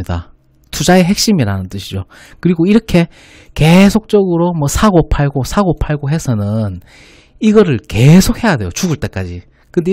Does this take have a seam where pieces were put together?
no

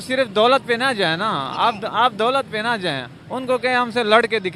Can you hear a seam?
no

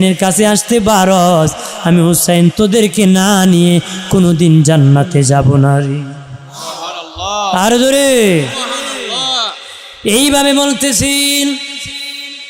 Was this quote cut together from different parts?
no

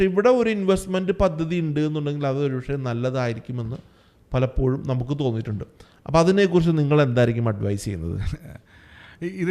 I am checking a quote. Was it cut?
no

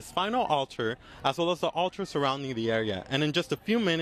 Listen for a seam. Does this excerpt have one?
no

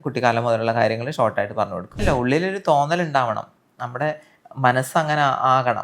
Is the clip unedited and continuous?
no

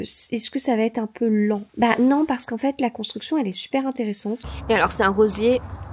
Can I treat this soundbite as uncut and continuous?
no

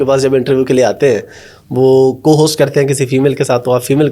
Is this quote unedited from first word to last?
yes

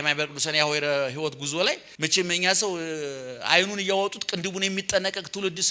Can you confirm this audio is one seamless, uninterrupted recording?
no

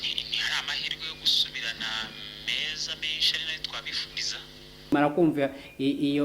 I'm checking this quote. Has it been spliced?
yes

